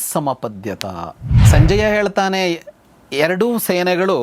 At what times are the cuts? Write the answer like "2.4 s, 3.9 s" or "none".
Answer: 1.2 s